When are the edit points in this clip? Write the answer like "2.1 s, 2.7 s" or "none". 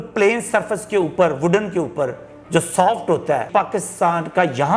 3.5 s